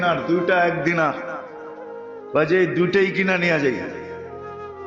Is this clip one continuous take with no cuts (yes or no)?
no